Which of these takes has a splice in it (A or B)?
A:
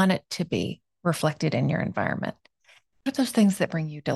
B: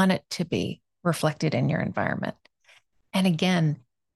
A